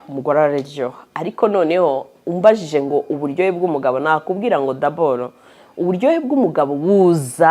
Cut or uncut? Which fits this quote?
uncut